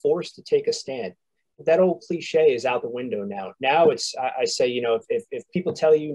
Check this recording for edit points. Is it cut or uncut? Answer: cut